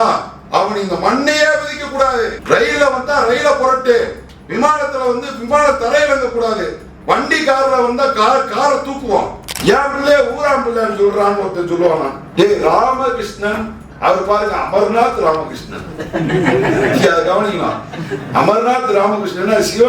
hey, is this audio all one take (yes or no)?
no